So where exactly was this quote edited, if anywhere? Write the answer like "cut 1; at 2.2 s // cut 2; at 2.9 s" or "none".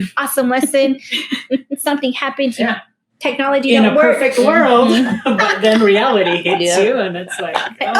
none